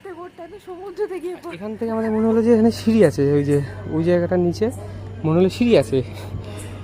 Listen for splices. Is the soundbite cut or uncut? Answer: cut